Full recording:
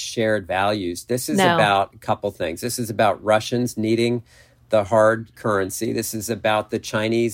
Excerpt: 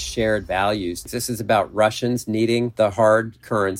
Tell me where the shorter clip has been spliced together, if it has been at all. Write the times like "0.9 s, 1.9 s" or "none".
1.0 s, 2.7 s